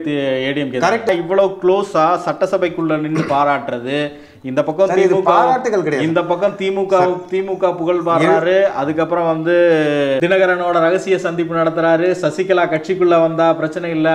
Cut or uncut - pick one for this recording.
cut